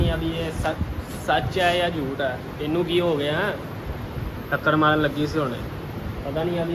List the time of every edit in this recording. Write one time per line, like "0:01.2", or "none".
none